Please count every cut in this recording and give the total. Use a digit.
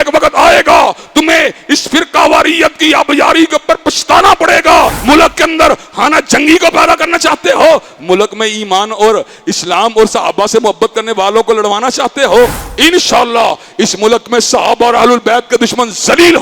1